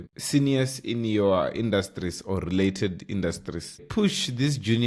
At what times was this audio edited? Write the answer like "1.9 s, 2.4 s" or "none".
none